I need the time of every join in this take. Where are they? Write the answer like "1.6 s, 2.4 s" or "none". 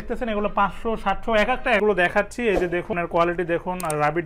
1.8 s, 2.9 s